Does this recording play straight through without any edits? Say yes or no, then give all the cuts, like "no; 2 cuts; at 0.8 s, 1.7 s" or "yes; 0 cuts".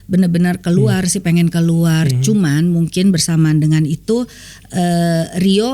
yes; 0 cuts